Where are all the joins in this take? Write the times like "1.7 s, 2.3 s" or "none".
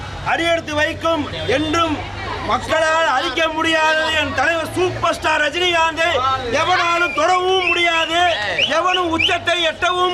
none